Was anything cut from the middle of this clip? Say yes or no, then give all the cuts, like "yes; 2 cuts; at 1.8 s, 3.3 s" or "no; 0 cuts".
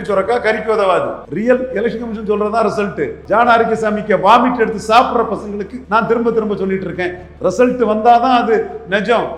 yes; 4 cuts; at 1.2 s, 3.2 s, 5.7 s, 7.2 s